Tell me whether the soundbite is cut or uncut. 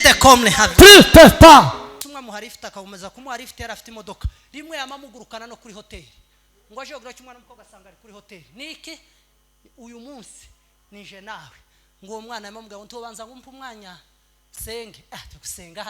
cut